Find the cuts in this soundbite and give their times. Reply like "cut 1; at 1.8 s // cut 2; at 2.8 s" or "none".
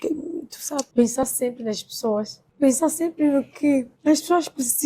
cut 1; at 0.9 s // cut 2; at 2.4 s // cut 3; at 3.9 s

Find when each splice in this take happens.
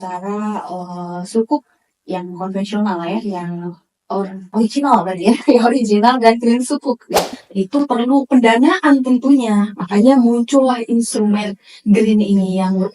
cut 1; at 7.4 s

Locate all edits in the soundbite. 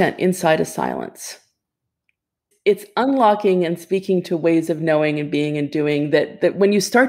cut 1; at 2.5 s

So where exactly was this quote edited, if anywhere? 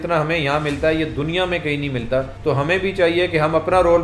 cut 1; at 2.3 s

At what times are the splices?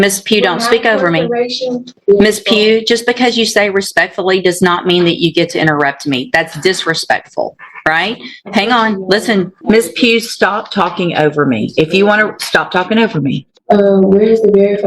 cut 1; at 2.0 s // cut 2; at 9.6 s // cut 3; at 13.5 s

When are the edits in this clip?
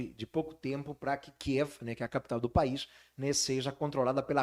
none

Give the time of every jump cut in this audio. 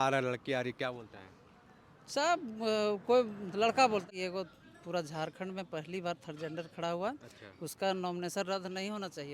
cut 1; at 4.1 s

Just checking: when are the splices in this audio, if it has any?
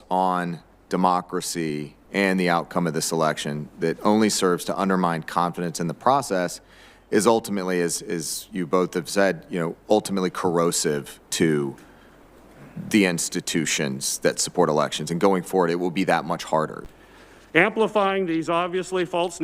cut 1; at 16.8 s

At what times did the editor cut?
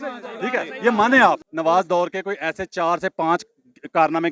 cut 1; at 1.5 s

